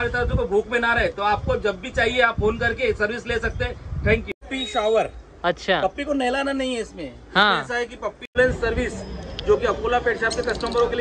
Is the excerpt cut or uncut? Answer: cut